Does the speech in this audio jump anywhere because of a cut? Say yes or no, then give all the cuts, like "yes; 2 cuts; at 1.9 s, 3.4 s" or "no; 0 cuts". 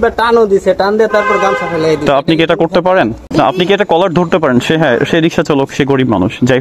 yes; 1 cut; at 3.3 s